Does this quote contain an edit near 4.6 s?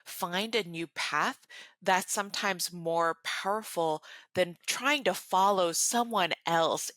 yes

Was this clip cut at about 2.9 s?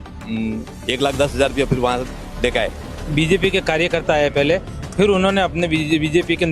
yes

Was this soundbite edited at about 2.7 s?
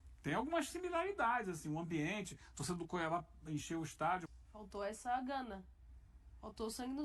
no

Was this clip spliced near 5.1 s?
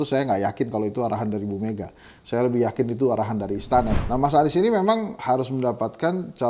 yes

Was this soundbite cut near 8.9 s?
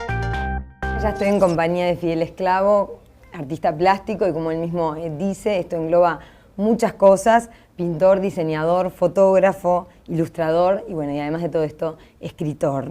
no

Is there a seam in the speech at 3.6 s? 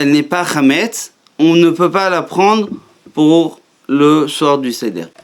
no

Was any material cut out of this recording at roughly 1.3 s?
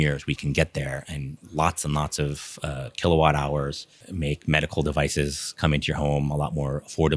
yes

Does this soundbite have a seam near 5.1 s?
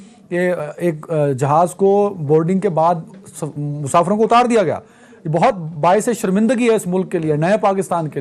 no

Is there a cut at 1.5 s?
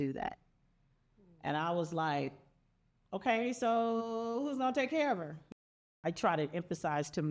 no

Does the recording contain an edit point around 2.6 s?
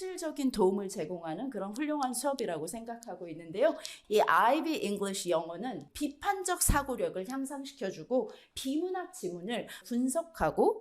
no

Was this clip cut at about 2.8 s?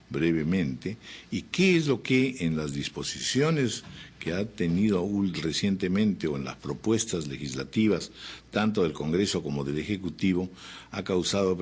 yes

